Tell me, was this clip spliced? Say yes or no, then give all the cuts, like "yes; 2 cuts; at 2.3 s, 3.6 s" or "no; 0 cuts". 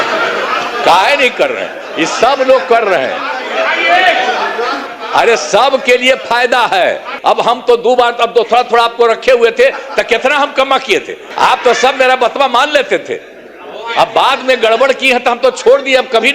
yes; 3 cuts; at 4.8 s, 7.1 s, 11.2 s